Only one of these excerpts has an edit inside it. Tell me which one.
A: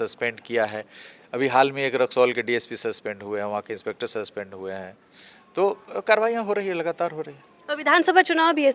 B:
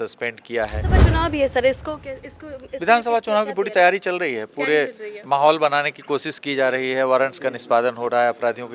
B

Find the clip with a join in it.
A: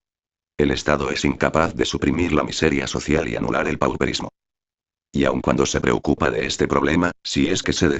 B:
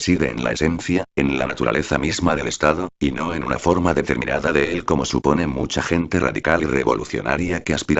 B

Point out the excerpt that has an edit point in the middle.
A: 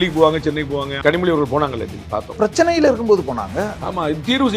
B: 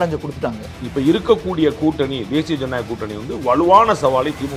A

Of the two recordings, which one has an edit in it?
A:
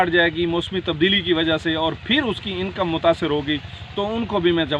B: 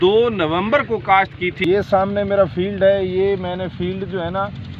B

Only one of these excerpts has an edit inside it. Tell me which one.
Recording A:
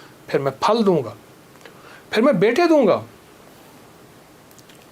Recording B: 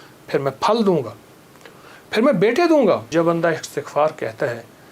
B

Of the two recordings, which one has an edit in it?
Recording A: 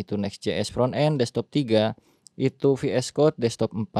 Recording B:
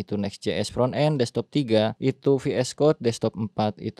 B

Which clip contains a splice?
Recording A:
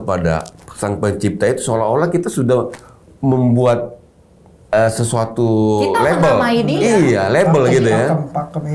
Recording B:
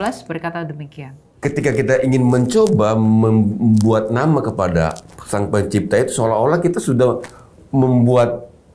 B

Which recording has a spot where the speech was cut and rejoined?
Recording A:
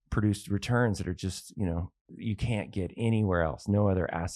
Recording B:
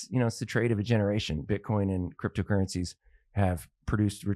A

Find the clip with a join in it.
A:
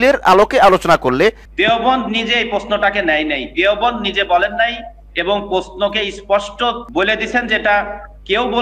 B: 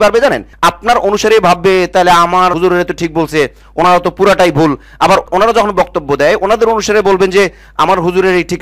A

